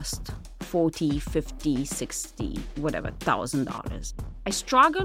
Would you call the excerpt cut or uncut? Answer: cut